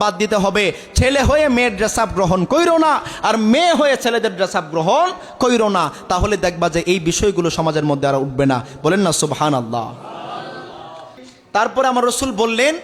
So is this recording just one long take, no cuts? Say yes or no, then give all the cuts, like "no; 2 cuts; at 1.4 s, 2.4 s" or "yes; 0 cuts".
yes; 0 cuts